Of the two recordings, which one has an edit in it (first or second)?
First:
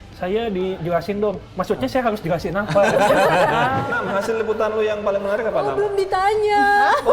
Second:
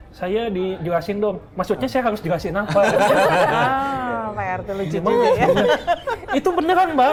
first